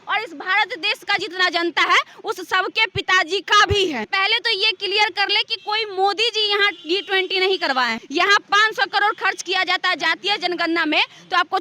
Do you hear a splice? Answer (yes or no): yes